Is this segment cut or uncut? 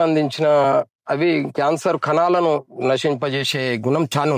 uncut